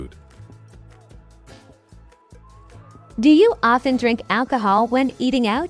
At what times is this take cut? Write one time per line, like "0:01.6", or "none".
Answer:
none